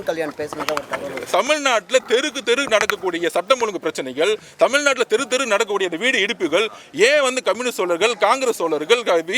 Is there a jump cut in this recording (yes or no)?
yes